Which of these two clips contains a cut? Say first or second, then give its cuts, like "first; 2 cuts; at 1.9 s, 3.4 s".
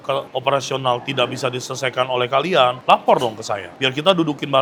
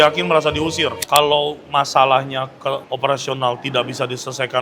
second; 1 cut; at 1.0 s